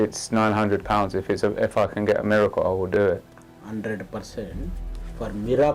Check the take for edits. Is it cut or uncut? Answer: uncut